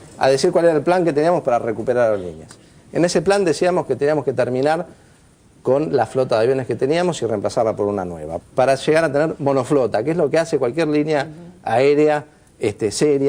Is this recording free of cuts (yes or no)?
yes